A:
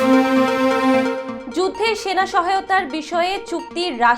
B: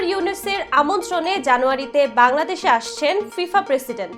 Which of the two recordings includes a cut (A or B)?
A